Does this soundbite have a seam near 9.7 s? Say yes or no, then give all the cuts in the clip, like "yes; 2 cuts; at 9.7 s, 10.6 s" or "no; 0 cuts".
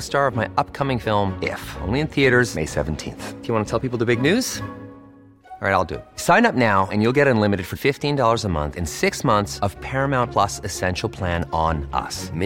no; 0 cuts